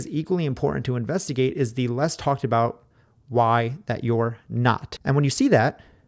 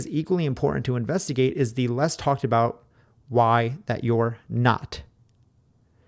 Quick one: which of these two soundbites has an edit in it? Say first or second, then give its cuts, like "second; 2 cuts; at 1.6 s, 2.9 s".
first; 1 cut; at 4.9 s